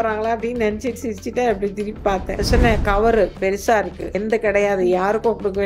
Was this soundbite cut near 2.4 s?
yes; 2 cuts; at 2.4 s, 4.2 s

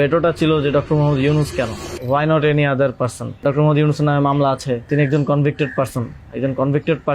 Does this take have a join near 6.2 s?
no; 3 cuts; at 1.9 s, 3.4 s, 4.9 s

